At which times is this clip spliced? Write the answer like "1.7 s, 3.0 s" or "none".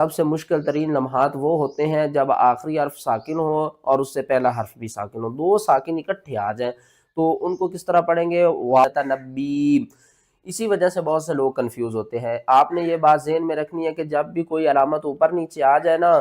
8.8 s